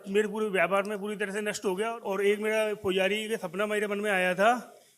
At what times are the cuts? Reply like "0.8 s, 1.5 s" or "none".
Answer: 2.0 s